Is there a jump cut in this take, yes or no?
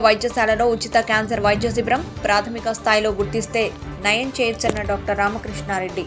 no